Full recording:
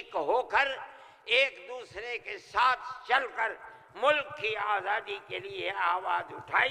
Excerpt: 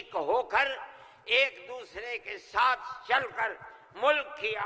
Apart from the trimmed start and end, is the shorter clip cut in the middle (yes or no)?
no